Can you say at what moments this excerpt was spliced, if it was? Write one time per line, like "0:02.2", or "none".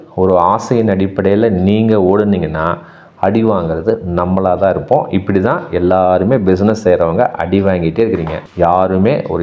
none